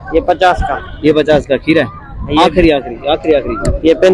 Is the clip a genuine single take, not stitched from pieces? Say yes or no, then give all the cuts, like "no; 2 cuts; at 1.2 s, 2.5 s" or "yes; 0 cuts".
yes; 0 cuts